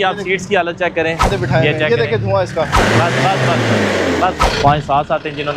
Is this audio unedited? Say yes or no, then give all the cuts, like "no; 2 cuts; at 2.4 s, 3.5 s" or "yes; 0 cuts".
no; 3 cuts; at 1.3 s, 2.8 s, 4.4 s